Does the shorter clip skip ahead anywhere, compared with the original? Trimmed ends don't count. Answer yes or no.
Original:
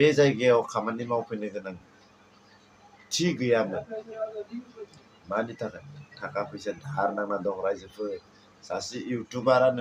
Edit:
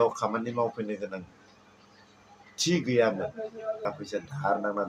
yes